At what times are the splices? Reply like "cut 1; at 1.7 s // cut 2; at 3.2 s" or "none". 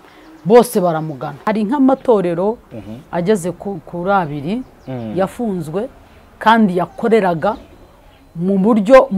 cut 1; at 1.4 s

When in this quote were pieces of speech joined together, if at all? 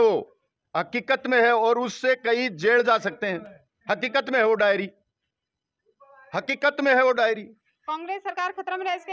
none

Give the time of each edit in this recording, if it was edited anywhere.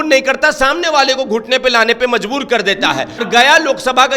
cut 1; at 3.2 s

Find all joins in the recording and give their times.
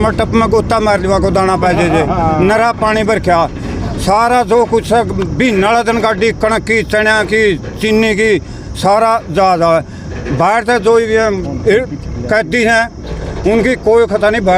none

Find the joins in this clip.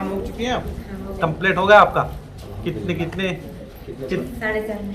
none

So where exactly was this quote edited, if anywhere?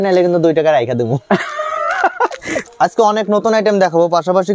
cut 1; at 2.7 s

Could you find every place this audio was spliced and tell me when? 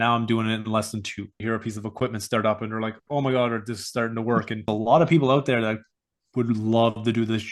cut 1; at 1.4 s // cut 2; at 4.6 s

